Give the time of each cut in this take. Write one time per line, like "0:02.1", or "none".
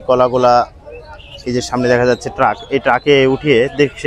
none